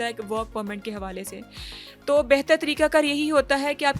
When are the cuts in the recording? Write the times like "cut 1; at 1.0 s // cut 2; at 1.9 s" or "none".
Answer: none

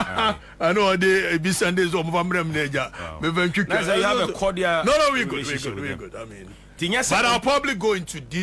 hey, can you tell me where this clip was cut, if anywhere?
none

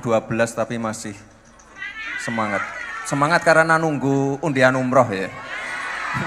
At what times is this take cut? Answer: none

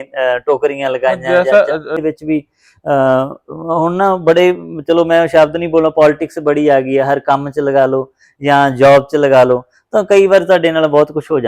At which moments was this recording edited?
cut 1; at 2.0 s

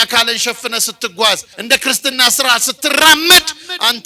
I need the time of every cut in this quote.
cut 1; at 1.5 s

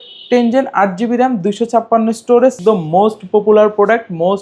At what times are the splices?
cut 1; at 2.6 s

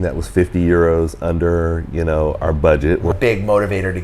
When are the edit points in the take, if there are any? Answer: cut 1; at 3.1 s

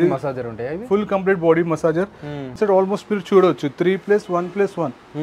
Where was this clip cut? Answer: cut 1; at 2.6 s

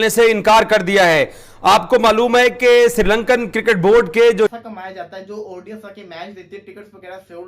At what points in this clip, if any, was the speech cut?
cut 1; at 4.5 s

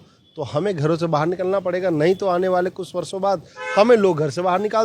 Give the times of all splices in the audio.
none

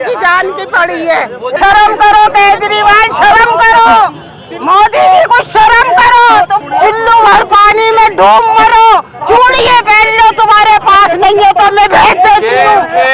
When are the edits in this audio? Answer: cut 1; at 1.5 s // cut 2; at 6.6 s

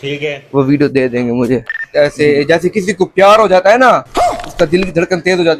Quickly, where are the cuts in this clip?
cut 1; at 1.8 s

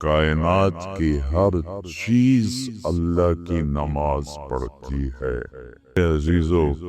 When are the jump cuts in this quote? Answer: cut 1; at 6.0 s

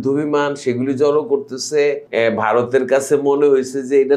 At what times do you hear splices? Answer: cut 1; at 2.1 s

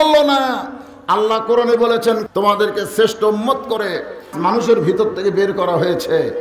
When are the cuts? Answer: cut 1; at 2.2 s // cut 2; at 4.3 s

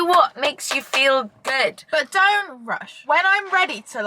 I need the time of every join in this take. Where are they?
cut 1; at 3.0 s

